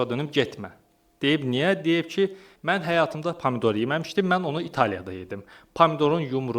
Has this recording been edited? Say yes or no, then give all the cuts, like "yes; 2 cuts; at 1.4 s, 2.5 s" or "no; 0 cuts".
yes; 1 cut; at 2.5 s